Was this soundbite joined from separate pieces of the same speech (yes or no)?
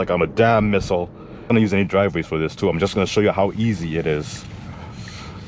yes